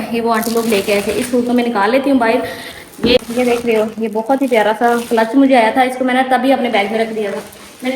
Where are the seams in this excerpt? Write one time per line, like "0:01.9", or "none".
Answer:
0:03.2